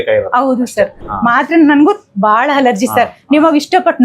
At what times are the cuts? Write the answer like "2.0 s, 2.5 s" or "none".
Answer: 1.0 s

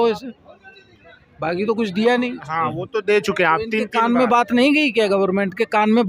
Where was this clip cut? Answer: 2.4 s

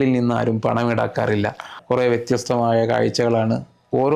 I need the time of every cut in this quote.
1.8 s

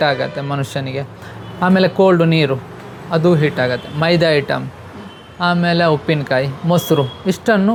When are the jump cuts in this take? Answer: none

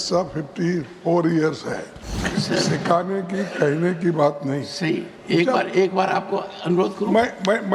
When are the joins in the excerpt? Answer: 2.2 s

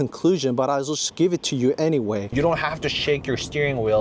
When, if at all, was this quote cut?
2.3 s

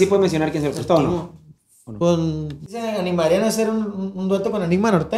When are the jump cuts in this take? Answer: 2.8 s

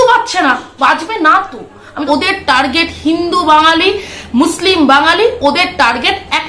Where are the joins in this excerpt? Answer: 1.9 s

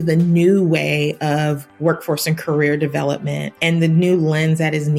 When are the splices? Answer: 1.7 s, 3.5 s

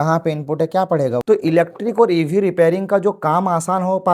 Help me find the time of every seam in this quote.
1.2 s

